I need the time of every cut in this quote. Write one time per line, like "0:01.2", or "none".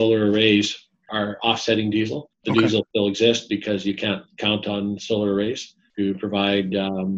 0:01.1
0:02.3
0:02.9
0:05.8